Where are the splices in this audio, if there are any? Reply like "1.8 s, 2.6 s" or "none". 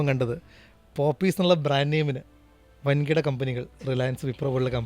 none